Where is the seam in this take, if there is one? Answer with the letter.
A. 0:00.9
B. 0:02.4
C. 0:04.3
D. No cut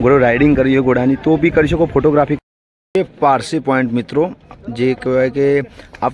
B